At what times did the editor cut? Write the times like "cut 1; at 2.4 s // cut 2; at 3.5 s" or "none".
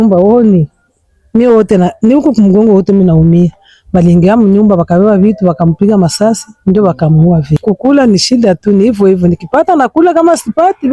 cut 1; at 7.6 s